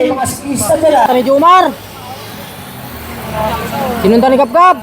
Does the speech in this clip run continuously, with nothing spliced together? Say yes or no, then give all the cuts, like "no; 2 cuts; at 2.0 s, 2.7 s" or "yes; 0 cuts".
no; 1 cut; at 1.1 s